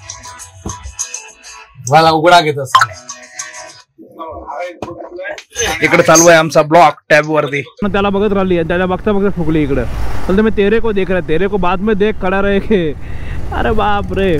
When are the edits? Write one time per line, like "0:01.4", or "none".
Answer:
0:07.9